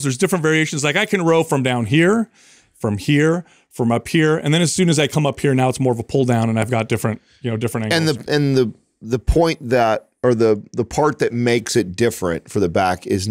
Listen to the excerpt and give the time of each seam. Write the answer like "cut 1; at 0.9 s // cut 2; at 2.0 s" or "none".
none